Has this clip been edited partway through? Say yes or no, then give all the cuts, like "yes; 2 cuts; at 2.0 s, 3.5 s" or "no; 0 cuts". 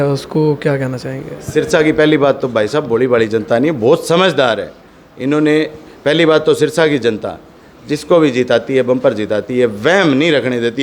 no; 0 cuts